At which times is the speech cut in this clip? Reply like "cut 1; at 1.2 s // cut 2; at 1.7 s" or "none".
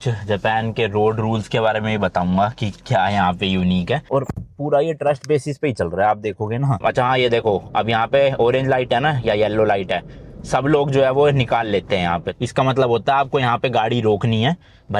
cut 1; at 4.1 s // cut 2; at 6.8 s // cut 3; at 12.3 s